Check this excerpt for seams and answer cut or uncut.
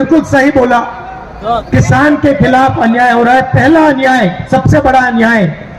uncut